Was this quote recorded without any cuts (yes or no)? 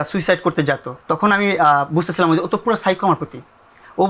no